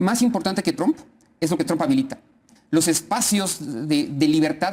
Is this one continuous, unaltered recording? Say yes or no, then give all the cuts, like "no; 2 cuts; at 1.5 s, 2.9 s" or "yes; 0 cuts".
yes; 0 cuts